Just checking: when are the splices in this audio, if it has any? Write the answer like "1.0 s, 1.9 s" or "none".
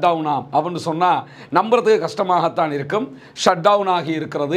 none